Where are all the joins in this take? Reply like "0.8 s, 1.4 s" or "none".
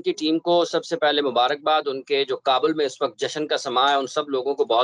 none